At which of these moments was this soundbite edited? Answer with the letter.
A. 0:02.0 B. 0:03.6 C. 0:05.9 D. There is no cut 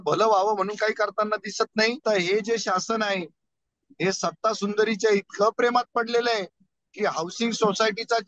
A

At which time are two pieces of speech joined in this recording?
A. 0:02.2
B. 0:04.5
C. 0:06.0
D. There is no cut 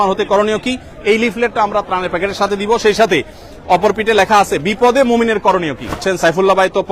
C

